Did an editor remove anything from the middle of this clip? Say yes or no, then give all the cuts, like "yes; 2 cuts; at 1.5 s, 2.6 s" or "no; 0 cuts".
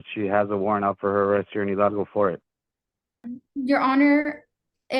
yes; 1 cut; at 3.4 s